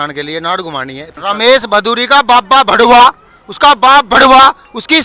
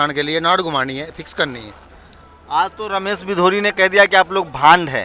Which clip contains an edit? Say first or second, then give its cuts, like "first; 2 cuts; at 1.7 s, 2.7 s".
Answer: first; 1 cut; at 1.2 s